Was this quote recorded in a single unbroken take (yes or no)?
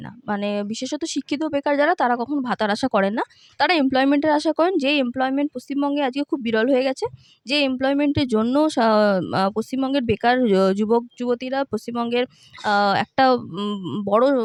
yes